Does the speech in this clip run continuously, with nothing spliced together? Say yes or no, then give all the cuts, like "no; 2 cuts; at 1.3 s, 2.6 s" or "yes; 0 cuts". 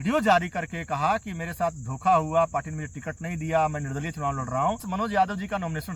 no; 1 cut; at 4.9 s